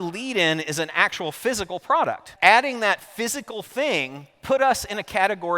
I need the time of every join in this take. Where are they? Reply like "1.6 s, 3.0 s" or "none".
2.2 s